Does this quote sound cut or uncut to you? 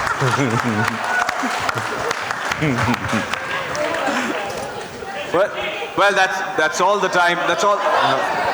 uncut